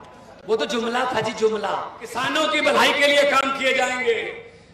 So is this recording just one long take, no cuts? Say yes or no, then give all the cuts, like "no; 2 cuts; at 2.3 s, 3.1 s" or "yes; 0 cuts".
no; 1 cut; at 2.2 s